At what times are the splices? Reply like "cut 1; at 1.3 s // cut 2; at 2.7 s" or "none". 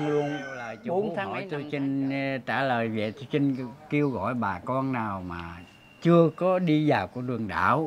cut 1; at 1.4 s

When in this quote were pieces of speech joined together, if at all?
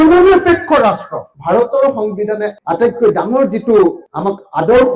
cut 1; at 1.4 s // cut 2; at 2.5 s

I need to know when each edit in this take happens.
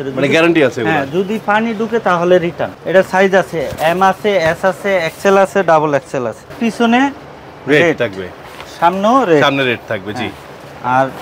cut 1; at 2.7 s // cut 2; at 6.6 s

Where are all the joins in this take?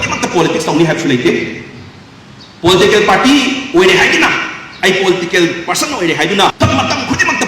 cut 1; at 6.5 s

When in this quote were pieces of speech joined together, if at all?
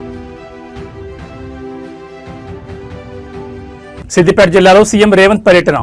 cut 1; at 3.6 s

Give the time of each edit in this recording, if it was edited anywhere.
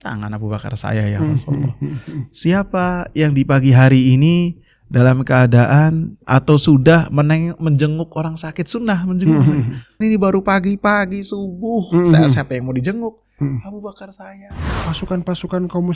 cut 1; at 14.7 s

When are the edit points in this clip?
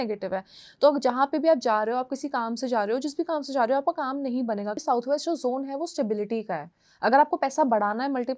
cut 1; at 4.8 s

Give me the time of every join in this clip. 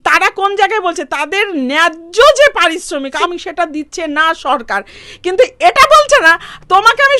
cut 1; at 3.2 s // cut 2; at 5.0 s

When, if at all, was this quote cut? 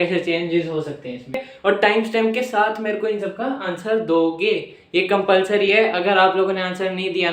cut 1; at 1.5 s

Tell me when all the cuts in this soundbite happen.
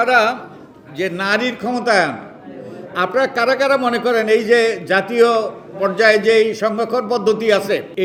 none

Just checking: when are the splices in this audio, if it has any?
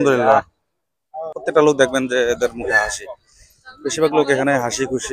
cut 1; at 1.4 s

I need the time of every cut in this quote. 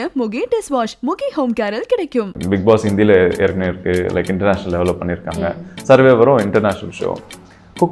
cut 1; at 2.3 s

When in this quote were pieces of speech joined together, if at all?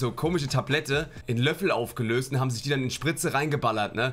cut 1; at 1.2 s

